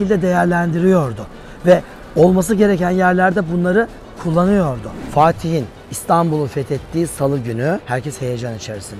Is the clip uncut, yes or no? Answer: no